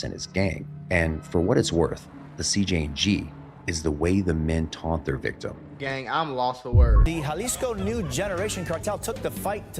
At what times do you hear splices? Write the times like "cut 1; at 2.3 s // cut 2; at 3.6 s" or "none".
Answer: cut 1; at 7.0 s